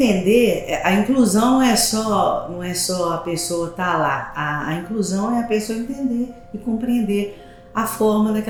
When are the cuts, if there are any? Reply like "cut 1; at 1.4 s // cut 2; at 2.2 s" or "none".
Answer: none